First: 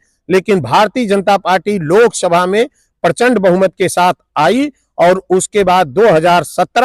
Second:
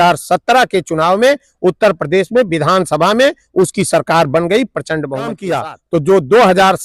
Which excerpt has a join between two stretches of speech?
second; 1 cut; at 5.5 s

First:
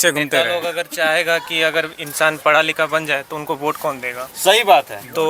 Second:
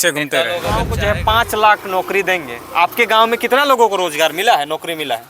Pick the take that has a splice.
second; 1 cut; at 0.9 s

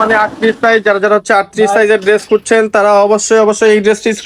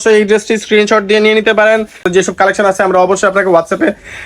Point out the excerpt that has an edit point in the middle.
second; 1 cut; at 2.0 s

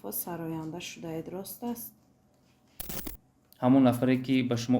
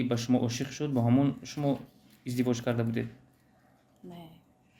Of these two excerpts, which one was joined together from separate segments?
first; 1 cut; at 2.9 s

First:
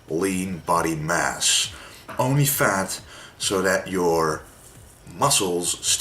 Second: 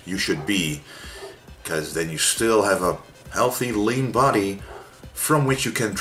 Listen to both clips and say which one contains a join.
first; 1 cut; at 2.5 s

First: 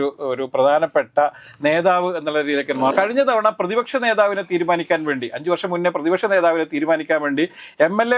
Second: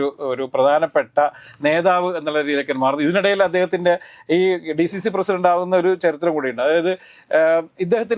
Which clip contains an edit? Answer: first; 1 cut; at 2.9 s

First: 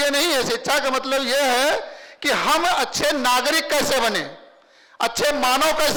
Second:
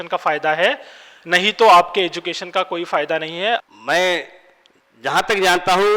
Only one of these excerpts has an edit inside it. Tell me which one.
second; 1 cut; at 3.6 s

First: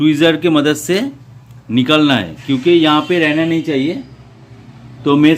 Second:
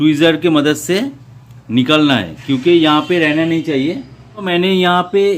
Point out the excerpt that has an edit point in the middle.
second; 1 cut; at 4.5 s

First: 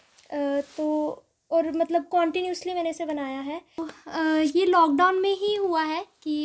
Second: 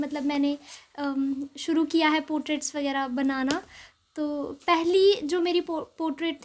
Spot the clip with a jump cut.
first; 1 cut; at 3.8 s

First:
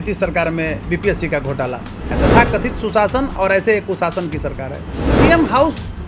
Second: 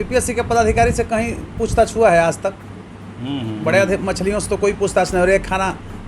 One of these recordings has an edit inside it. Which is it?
first; 2 cuts; at 2.1 s, 5.1 s

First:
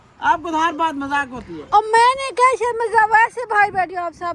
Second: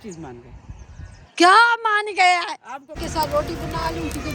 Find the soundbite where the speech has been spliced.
second; 1 cut; at 3.0 s

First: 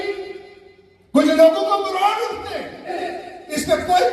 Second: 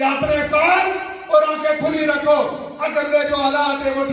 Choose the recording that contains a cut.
first; 1 cut; at 3.0 s

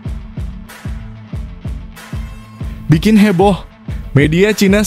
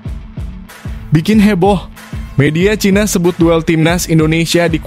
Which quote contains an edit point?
second; 1 cut; at 1.1 s

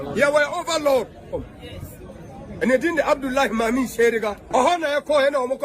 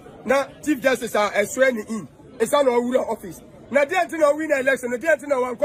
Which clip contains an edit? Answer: first; 1 cut; at 4.4 s

